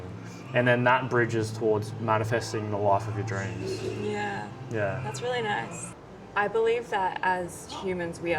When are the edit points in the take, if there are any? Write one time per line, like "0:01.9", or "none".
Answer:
0:05.9